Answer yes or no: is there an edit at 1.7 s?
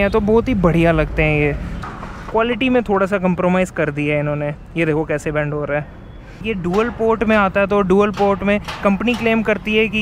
yes